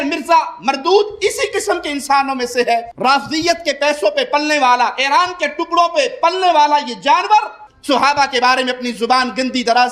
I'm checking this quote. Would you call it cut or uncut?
uncut